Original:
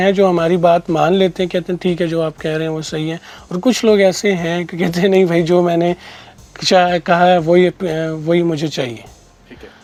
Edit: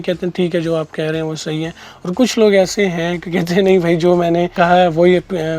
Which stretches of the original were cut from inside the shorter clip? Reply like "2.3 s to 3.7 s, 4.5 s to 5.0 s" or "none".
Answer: 6.0 s to 7.0 s